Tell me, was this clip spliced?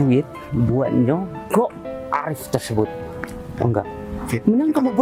no; 0 cuts

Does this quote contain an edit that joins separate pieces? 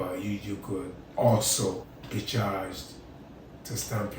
yes; 2 cuts; at 1.0 s, 1.9 s

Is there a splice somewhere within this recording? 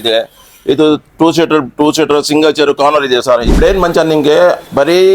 yes; 1 cut; at 3.5 s

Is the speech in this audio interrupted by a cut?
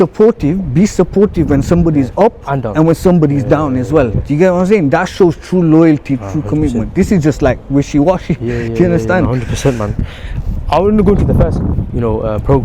no; 0 cuts

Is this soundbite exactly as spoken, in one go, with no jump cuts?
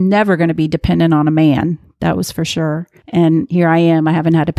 no; 1 cut; at 2.9 s

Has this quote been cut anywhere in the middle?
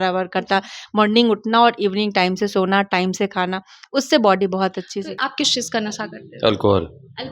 yes; 1 cut; at 5.1 s

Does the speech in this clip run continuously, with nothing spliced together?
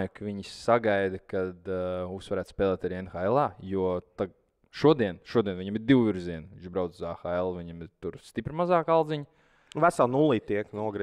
yes; 0 cuts

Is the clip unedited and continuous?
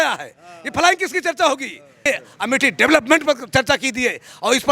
no; 1 cut; at 2.0 s

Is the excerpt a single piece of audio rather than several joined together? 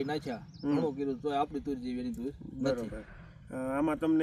yes; 0 cuts

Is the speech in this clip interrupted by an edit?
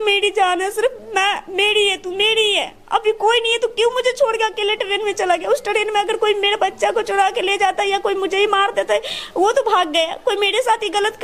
no; 0 cuts

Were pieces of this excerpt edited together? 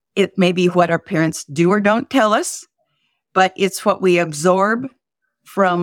no; 0 cuts

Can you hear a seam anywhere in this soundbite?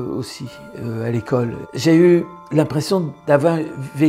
yes; 2 cuts; at 1.7 s, 3.1 s

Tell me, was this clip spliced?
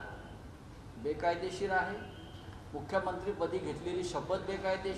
no; 0 cuts

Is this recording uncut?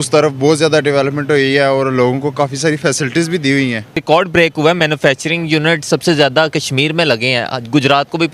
no; 1 cut; at 4.0 s

